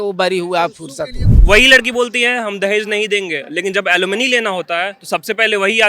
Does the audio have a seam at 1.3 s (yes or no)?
yes